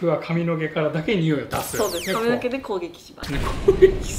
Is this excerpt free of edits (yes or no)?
yes